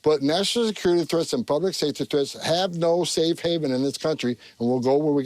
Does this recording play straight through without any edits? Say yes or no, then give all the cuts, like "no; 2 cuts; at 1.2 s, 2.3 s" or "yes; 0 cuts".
yes; 0 cuts